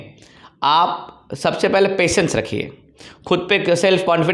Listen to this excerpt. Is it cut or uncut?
uncut